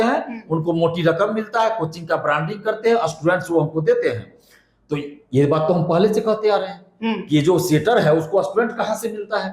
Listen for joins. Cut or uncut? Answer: uncut